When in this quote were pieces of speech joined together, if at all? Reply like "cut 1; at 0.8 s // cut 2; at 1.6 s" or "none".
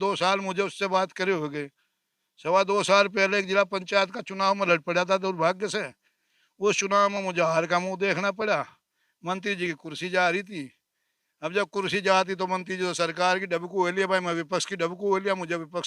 none